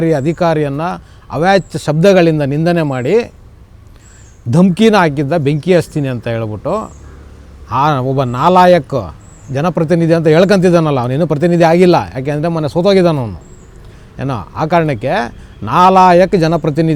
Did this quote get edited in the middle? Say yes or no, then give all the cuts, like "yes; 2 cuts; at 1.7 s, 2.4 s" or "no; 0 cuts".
no; 0 cuts